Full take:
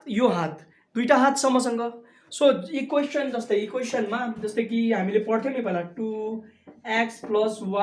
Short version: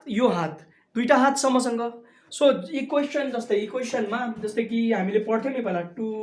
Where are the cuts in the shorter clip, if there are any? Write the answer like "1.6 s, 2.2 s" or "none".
none